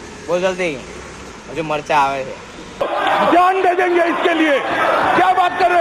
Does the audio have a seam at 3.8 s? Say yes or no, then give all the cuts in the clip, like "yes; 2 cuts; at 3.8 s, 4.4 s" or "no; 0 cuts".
no; 0 cuts